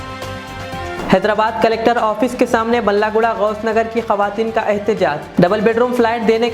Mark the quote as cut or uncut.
cut